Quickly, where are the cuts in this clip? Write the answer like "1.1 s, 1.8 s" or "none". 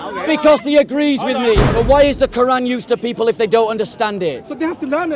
1.6 s